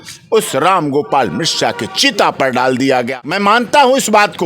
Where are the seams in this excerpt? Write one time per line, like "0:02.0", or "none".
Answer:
0:03.2